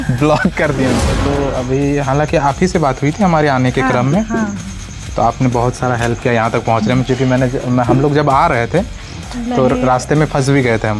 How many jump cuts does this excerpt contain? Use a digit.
1